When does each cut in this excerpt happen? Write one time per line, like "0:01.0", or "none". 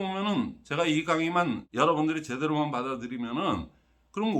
0:01.7